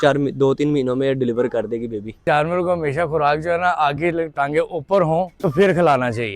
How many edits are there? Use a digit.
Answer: 2